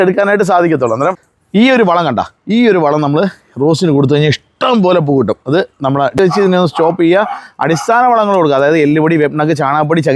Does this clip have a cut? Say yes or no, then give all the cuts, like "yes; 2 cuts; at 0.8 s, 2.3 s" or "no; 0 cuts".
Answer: yes; 2 cuts; at 1.3 s, 6.2 s